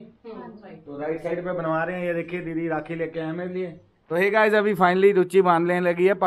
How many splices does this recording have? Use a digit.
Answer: 1